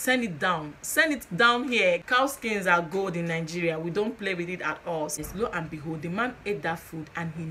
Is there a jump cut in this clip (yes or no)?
yes